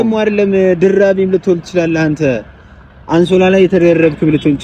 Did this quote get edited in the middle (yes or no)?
no